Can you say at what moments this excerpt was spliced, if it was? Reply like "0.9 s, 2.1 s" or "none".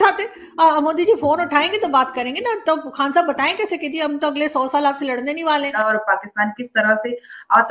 5.7 s